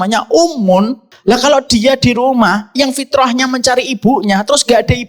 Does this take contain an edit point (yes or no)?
yes